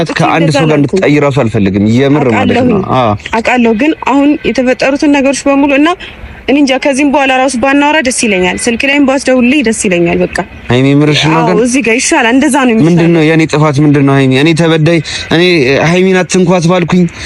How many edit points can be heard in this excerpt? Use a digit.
0